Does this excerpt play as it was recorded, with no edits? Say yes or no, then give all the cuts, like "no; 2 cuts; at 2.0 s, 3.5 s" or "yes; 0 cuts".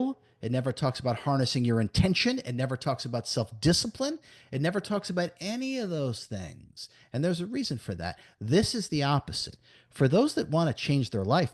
yes; 0 cuts